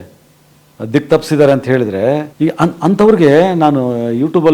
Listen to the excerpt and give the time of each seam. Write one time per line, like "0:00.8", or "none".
0:02.3